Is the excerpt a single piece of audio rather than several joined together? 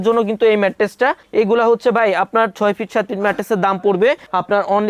yes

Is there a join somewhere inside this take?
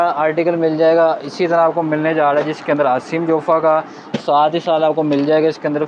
no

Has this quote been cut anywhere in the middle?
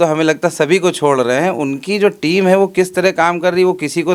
no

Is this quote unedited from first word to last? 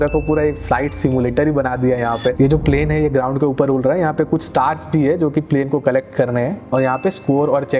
no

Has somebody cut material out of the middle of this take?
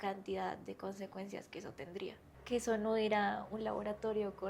yes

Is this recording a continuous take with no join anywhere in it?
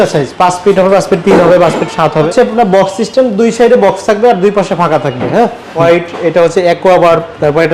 no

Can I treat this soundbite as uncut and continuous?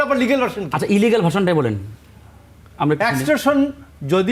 yes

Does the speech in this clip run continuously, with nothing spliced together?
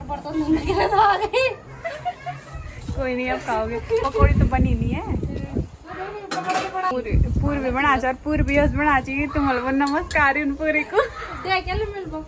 yes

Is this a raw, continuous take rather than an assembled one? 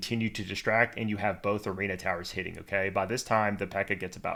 yes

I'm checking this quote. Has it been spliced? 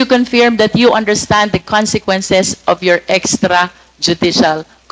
no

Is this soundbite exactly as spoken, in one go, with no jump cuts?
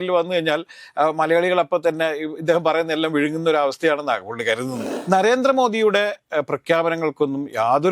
no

